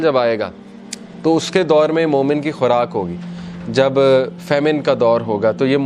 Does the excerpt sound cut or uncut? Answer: uncut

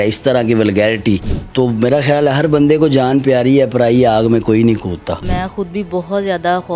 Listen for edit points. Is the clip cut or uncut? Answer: cut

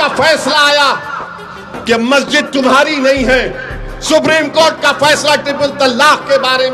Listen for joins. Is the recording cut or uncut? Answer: uncut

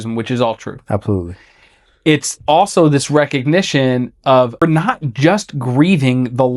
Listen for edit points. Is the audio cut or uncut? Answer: cut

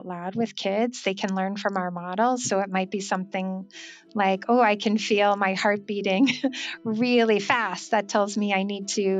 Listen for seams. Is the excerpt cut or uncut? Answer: uncut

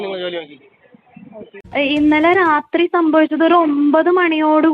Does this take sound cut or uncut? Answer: cut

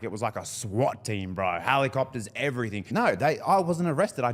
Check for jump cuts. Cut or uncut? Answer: cut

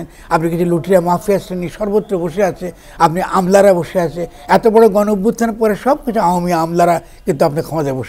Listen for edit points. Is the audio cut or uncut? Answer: uncut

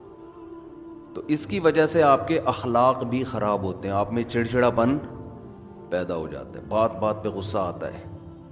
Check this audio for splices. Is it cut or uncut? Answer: cut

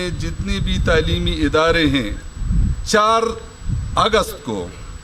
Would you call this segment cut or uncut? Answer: cut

